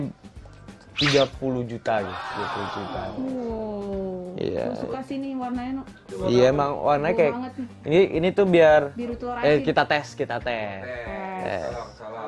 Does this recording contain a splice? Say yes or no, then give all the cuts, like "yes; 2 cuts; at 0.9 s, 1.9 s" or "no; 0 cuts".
no; 0 cuts